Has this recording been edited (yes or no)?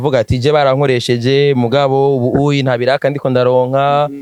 no